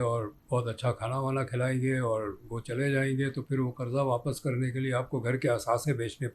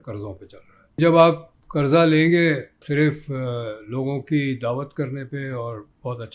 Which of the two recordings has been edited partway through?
second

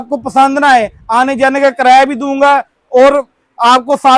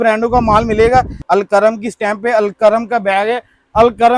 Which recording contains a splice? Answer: second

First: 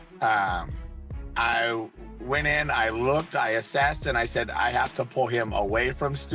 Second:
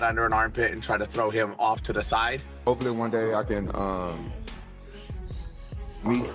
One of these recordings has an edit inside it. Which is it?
second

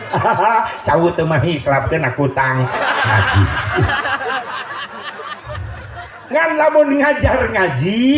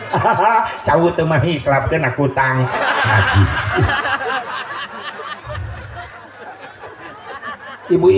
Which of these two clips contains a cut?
first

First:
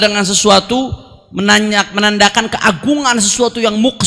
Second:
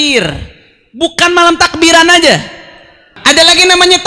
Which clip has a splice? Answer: second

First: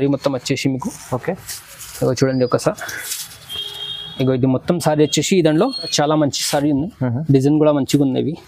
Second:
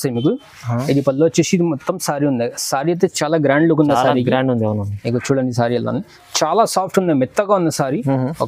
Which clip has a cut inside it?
first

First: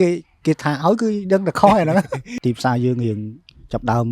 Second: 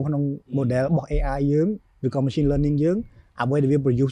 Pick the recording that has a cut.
first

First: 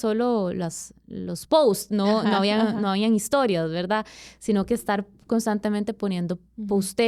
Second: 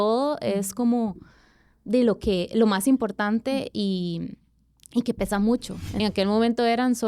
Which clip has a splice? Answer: second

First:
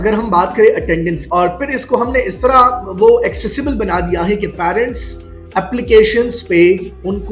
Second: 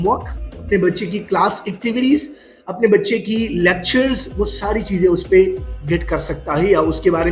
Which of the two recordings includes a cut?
first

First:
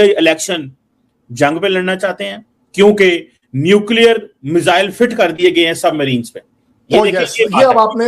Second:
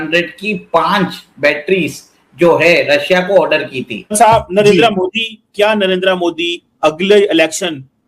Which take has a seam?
second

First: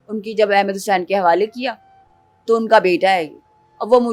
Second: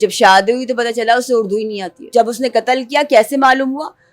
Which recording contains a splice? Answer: second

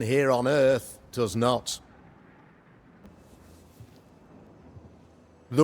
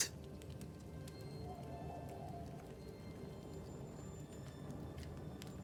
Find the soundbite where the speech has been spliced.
first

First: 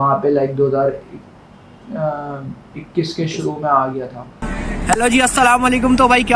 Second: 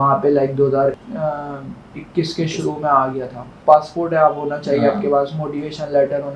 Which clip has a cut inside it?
second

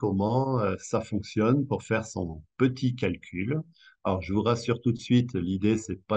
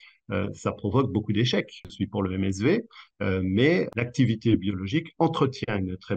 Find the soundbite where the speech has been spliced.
second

